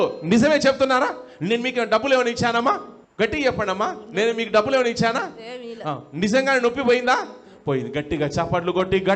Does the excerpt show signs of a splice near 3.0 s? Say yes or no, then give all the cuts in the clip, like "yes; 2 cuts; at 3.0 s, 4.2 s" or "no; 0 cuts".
yes; 1 cut; at 3.0 s